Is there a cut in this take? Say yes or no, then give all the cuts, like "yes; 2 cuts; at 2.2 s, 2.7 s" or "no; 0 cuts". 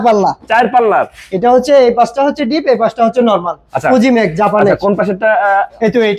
no; 0 cuts